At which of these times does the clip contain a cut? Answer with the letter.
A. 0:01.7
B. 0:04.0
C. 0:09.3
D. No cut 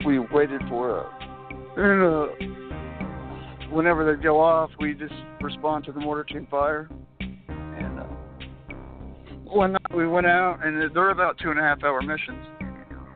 C